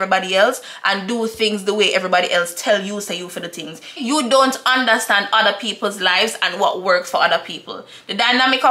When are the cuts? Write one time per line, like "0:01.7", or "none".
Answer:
0:03.9